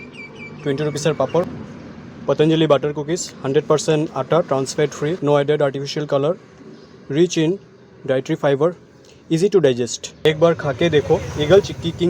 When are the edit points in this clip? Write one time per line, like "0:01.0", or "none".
0:01.5
0:05.2
0:10.2